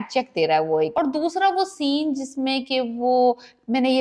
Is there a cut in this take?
yes; 1 cut; at 0.9 s

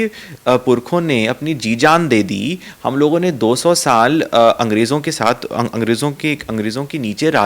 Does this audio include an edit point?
no; 0 cuts

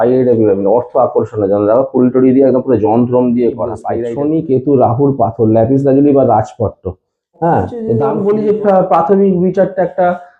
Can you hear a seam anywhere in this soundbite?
yes; 2 cuts; at 3.9 s, 8.0 s

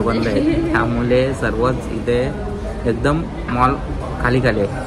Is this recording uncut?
yes; 0 cuts

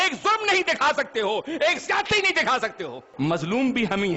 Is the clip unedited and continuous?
no; 1 cut; at 3.0 s

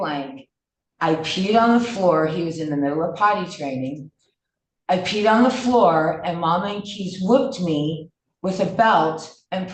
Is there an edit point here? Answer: no; 0 cuts

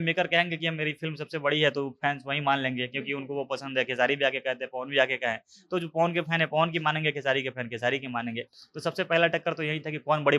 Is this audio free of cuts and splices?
yes; 0 cuts

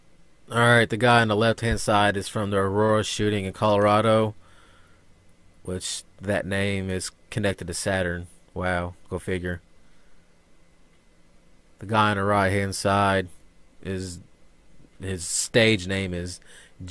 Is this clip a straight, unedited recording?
yes; 0 cuts

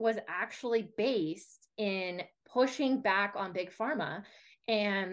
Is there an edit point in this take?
no; 0 cuts

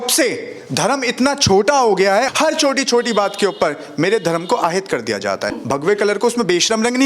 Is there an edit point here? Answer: yes; 2 cuts; at 2.3 s, 5.6 s

